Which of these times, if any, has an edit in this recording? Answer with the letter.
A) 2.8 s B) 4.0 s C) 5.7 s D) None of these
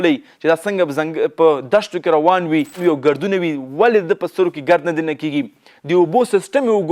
A